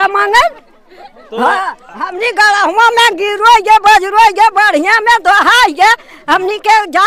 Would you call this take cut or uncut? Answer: uncut